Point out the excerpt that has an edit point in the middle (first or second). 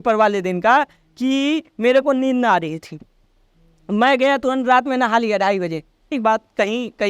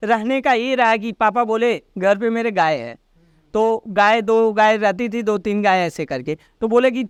first